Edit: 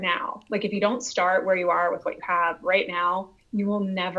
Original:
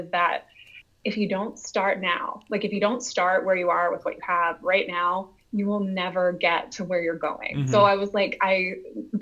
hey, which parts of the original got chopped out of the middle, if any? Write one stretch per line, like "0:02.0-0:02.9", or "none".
none